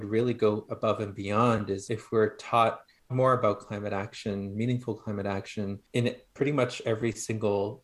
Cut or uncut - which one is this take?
cut